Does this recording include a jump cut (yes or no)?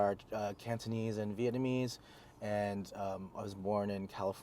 no